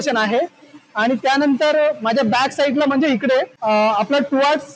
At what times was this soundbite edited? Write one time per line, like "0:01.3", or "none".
0:03.5